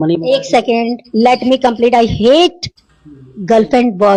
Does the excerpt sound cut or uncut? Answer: uncut